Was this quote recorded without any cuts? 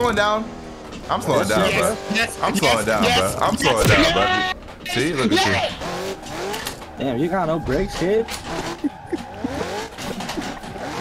yes; 0 cuts

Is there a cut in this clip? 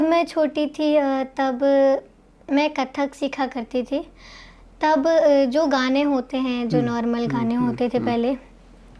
no; 0 cuts

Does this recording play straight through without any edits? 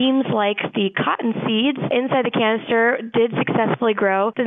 yes; 0 cuts

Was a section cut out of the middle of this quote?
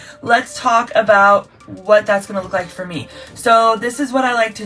no; 0 cuts

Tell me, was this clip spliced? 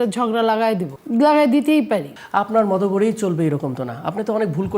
yes; 2 cuts; at 0.9 s, 2.2 s

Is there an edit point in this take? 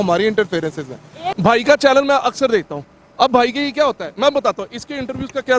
yes; 1 cut; at 1.2 s

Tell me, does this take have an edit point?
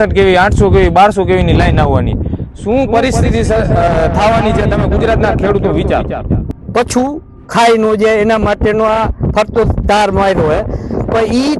yes; 1 cut; at 6.5 s

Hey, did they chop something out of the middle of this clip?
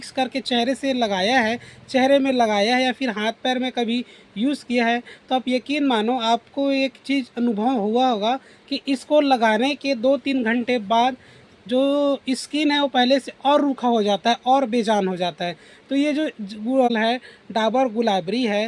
yes; 1 cut; at 16.9 s

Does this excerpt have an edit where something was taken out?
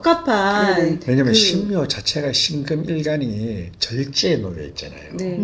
no; 0 cuts

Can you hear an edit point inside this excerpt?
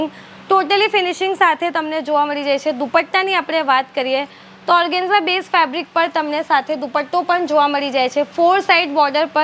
no; 0 cuts

